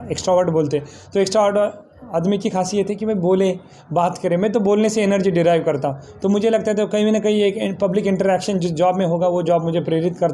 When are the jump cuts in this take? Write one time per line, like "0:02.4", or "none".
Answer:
none